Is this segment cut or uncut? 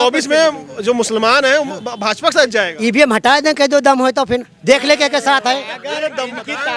uncut